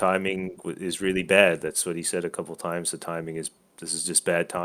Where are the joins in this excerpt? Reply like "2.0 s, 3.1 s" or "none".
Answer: none